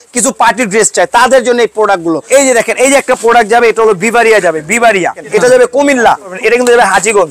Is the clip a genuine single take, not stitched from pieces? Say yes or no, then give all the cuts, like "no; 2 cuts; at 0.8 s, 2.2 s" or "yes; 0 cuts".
no; 3 cuts; at 2.2 s, 5.2 s, 6.3 s